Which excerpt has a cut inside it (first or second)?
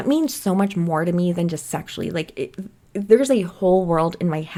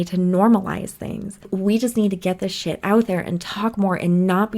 second